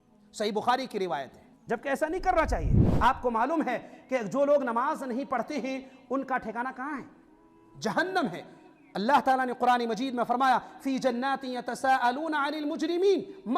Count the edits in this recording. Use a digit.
1